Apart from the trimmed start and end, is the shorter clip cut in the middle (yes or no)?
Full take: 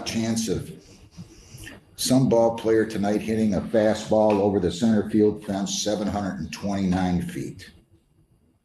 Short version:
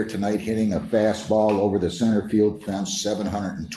no